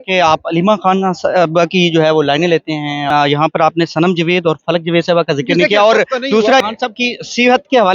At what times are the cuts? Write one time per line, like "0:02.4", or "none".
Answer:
0:03.1
0:06.6